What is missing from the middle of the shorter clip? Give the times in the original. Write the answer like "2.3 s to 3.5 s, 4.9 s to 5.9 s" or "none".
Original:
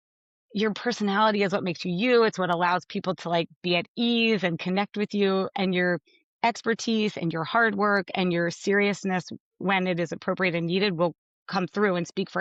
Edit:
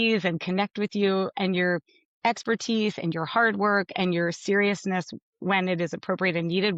none